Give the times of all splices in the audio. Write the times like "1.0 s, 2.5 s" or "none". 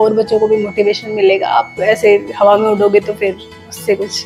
none